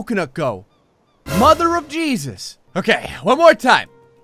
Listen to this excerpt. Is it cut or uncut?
cut